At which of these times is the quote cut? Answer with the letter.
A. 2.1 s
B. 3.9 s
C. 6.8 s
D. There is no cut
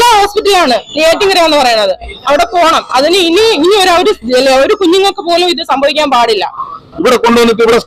C